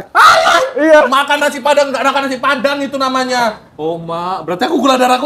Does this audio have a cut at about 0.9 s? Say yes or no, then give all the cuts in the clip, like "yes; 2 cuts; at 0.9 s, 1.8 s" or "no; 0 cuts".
no; 1 cut; at 3.7 s